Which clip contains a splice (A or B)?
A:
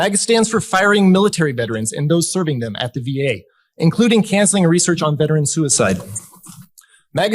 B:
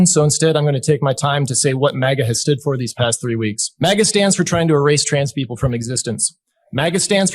B